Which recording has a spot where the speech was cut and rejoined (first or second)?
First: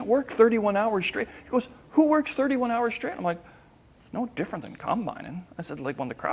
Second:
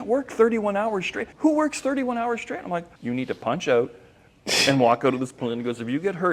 second